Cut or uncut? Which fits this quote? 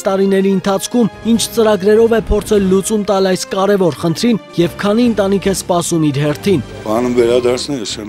cut